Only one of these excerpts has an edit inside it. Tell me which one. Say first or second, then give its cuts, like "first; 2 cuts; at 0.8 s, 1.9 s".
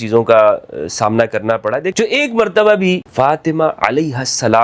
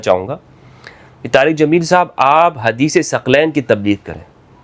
first; 2 cuts; at 1.9 s, 3.1 s